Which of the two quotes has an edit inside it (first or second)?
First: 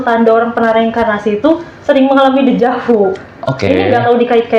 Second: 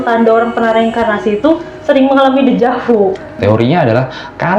second